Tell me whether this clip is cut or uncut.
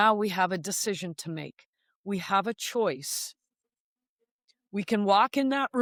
uncut